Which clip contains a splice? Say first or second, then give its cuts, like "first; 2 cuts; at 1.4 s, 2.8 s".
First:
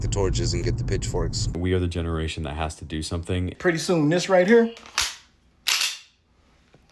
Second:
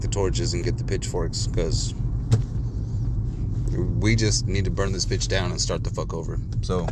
first; 2 cuts; at 1.5 s, 3.5 s